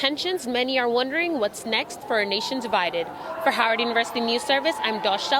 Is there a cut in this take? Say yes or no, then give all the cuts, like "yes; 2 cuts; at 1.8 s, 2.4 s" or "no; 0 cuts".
no; 0 cuts